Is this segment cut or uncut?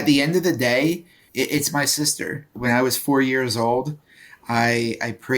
cut